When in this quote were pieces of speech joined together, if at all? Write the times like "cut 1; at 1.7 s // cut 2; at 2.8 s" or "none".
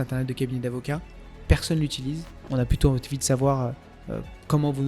cut 1; at 2.4 s